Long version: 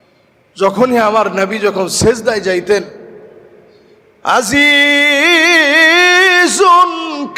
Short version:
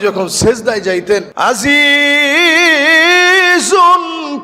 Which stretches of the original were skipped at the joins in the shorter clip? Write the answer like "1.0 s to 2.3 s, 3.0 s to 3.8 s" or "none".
2.9 s to 4.2 s